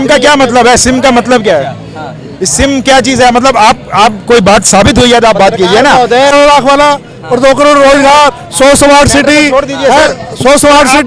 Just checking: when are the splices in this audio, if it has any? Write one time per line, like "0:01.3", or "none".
0:06.3